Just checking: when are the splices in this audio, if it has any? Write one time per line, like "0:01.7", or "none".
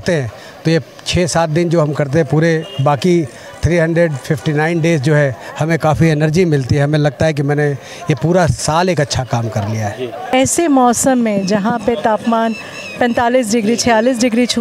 0:10.3